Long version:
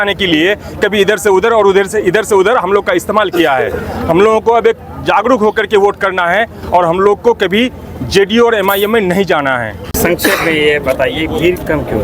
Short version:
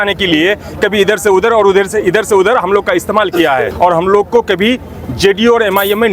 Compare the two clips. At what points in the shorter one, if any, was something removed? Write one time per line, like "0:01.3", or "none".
0:03.7